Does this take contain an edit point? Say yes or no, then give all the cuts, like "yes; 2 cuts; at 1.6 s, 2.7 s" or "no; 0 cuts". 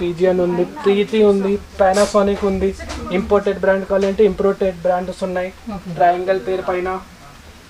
no; 0 cuts